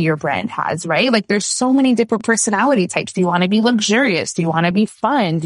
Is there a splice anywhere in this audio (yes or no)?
no